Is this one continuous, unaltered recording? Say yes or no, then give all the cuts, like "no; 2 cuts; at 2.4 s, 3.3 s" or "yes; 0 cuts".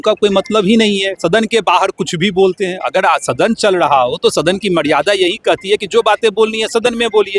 yes; 0 cuts